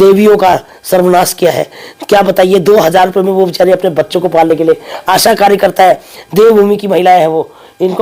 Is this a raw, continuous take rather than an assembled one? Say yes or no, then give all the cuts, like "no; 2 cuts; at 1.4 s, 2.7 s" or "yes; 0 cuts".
yes; 0 cuts